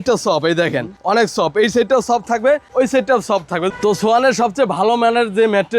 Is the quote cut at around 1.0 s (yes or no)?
no